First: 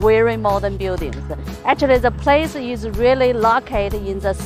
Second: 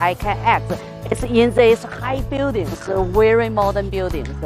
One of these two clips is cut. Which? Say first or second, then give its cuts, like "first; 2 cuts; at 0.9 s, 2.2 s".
second; 1 cut; at 1.4 s